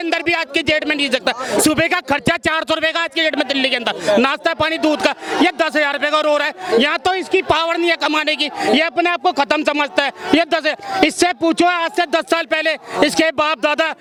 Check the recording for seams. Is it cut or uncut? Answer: uncut